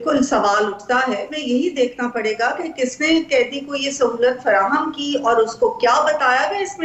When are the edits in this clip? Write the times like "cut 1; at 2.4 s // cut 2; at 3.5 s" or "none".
cut 1; at 1.3 s